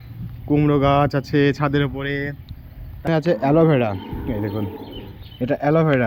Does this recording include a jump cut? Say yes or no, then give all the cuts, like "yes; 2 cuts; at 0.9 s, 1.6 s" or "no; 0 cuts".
yes; 1 cut; at 3.1 s